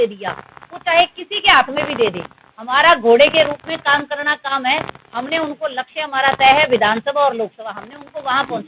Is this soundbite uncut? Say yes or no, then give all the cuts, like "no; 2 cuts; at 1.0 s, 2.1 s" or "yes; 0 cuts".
yes; 0 cuts